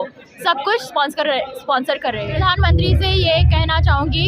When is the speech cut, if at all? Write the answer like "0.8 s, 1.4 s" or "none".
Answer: 2.3 s